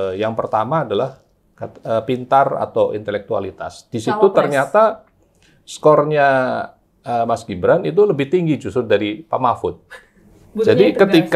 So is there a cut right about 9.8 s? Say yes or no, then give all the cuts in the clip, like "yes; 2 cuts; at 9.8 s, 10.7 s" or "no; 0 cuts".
yes; 1 cut; at 9.8 s